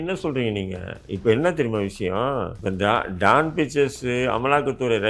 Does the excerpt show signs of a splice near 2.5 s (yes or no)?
yes